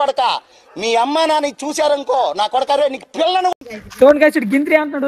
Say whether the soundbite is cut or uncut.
cut